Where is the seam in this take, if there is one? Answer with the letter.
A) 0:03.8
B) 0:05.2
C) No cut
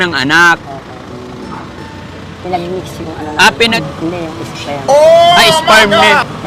A